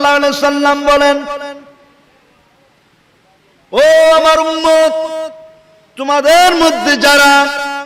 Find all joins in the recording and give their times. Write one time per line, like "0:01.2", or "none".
none